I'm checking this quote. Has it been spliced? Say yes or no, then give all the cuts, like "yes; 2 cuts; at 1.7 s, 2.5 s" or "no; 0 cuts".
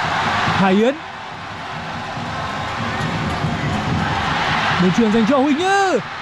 no; 0 cuts